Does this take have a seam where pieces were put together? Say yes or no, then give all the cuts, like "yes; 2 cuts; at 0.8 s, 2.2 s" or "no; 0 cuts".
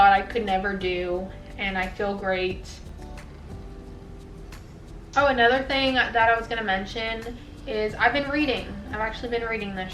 no; 0 cuts